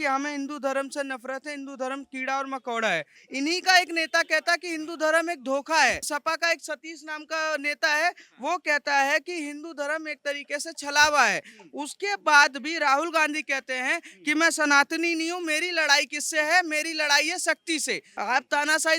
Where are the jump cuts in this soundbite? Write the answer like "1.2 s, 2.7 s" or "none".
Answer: 3.2 s, 6.1 s, 18.1 s